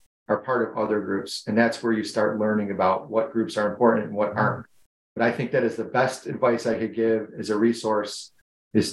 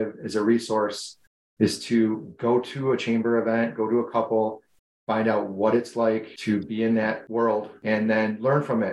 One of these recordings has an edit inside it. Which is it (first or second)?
second